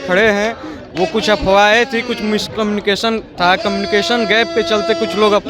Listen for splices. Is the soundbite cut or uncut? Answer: uncut